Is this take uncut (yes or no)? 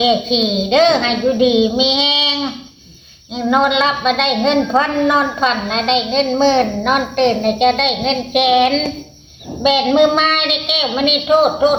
yes